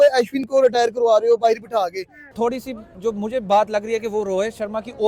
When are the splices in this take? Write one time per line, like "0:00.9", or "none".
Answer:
0:02.3